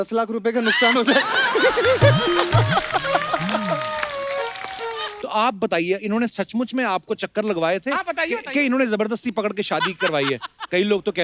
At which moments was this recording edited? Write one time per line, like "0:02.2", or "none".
0:05.1